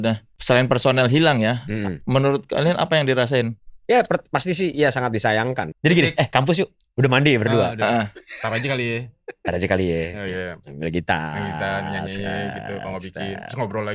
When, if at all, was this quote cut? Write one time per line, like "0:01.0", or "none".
0:05.7